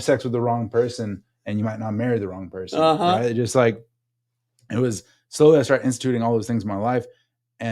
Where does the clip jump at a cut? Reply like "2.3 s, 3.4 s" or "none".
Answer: none